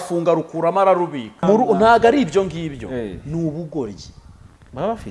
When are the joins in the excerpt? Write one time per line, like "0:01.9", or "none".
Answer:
0:01.4